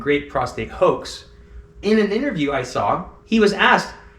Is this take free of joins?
no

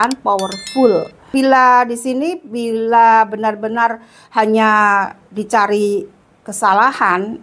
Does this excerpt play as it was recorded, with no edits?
no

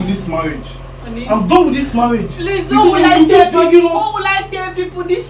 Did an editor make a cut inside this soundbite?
no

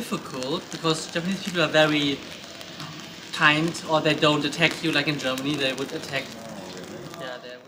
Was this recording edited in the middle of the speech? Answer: no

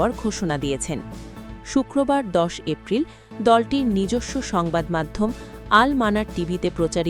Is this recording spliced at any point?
no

